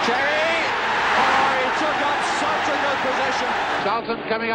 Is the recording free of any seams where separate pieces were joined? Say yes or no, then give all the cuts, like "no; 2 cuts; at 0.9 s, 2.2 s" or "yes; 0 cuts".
no; 2 cuts; at 1.2 s, 3.8 s